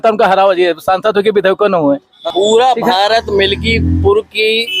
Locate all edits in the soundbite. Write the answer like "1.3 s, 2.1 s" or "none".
2.2 s